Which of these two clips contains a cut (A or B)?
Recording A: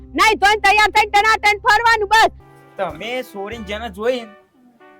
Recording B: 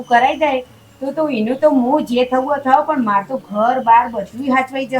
A